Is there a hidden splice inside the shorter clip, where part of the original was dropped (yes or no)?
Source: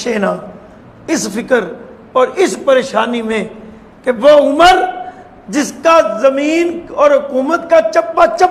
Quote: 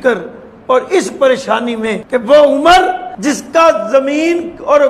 yes